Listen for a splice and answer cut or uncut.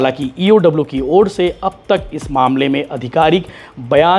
uncut